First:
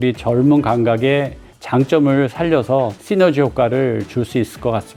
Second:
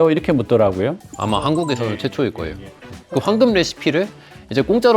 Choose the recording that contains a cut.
second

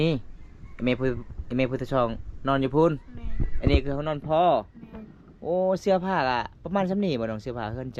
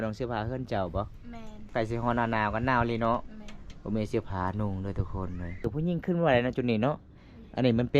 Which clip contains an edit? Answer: second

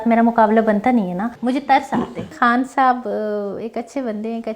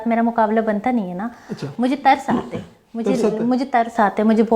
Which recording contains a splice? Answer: first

